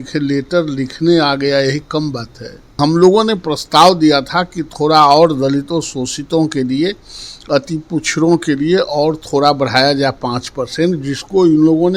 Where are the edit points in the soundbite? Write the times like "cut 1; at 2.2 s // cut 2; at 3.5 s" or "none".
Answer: cut 1; at 2.7 s

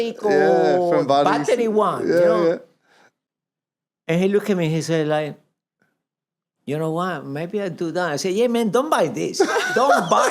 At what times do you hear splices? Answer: none

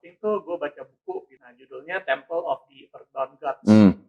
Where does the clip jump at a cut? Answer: cut 1; at 1.3 s

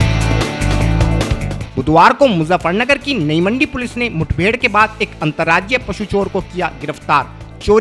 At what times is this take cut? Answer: cut 1; at 1.6 s

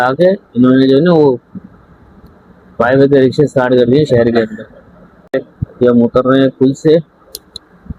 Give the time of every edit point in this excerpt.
cut 1; at 5.3 s

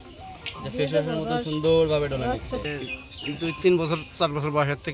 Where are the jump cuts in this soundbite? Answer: cut 1; at 2.6 s

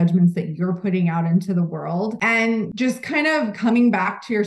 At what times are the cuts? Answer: cut 1; at 2.6 s

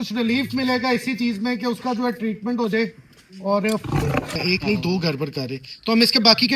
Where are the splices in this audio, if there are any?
cut 1; at 4.3 s

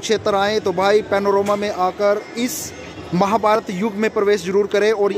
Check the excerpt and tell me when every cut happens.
none

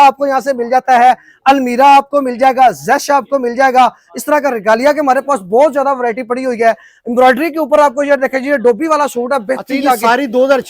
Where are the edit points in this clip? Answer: none

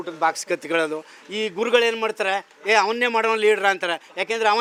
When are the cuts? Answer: none

